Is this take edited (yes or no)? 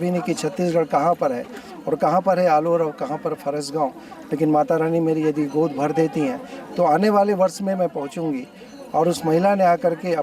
no